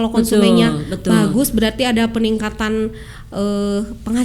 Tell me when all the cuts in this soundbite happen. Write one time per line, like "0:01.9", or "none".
none